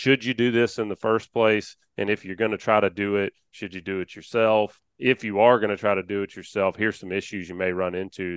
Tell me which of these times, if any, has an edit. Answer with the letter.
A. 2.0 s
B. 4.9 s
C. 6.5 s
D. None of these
B